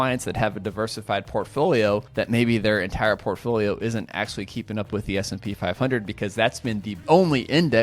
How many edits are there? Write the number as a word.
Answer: two